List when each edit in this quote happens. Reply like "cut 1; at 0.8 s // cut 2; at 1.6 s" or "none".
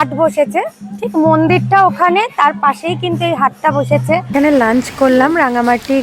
cut 1; at 4.3 s